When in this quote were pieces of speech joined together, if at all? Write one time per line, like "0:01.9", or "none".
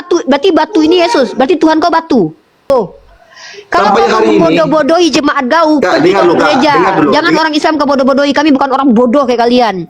0:02.7